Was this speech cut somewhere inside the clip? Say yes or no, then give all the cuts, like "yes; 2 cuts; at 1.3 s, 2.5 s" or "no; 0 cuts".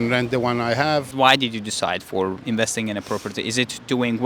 yes; 2 cuts; at 1.1 s, 2.4 s